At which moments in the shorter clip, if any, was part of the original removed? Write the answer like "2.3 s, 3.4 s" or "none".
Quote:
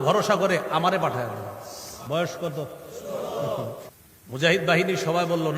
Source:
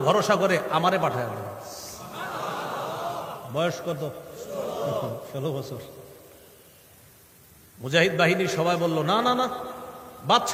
2.0 s, 3.8 s

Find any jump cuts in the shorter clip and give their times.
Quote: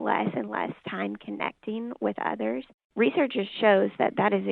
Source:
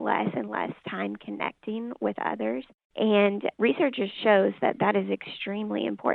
2.9 s

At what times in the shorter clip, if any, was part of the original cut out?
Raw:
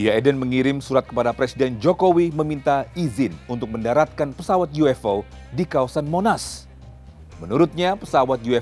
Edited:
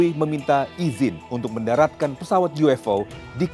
none

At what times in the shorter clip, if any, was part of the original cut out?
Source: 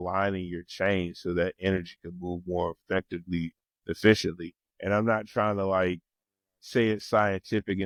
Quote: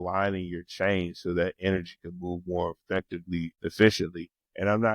3.5 s

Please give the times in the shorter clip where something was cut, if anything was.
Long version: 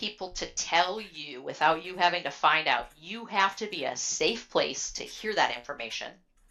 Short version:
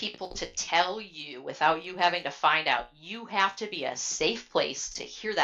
none

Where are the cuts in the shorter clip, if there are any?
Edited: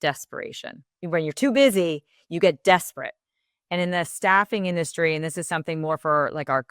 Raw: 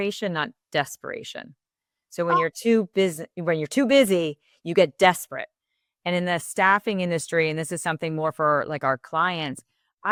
0.9 s

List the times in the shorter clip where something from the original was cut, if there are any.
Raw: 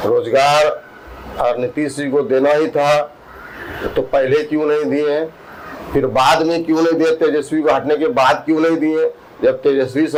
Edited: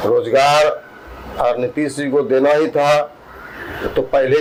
none

